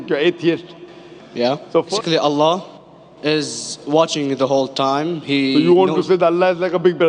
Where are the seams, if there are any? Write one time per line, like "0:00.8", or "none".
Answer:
0:01.9